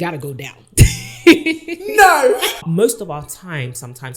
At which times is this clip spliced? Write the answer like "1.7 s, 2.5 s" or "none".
2.7 s